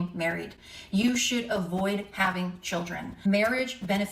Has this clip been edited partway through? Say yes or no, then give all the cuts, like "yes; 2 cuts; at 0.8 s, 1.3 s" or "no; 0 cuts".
yes; 2 cuts; at 1.5 s, 3.2 s